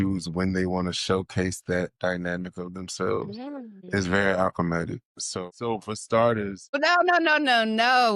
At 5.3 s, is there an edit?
yes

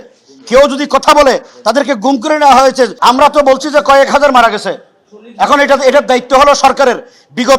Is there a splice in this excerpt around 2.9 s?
yes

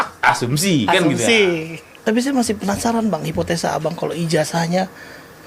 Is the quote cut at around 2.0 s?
yes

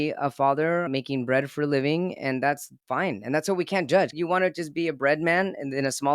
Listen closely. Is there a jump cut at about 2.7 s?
no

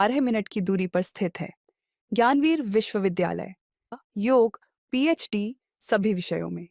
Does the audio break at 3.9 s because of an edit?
yes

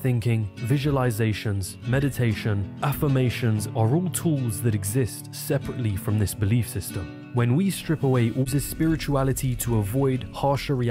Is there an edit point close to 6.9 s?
no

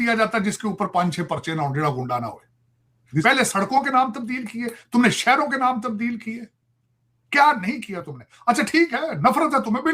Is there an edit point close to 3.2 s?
yes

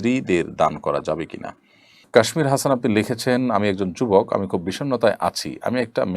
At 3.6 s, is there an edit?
no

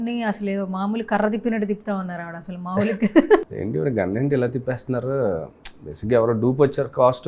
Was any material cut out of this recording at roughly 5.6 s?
no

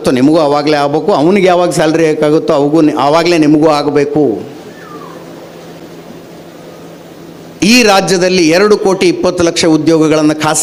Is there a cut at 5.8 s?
no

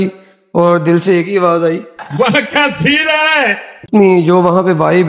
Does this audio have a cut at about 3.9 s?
yes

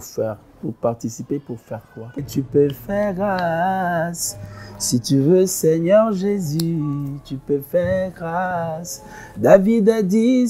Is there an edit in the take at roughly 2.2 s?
yes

